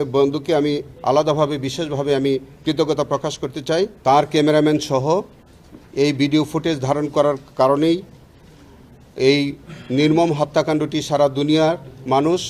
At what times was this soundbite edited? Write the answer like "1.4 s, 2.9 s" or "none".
4.0 s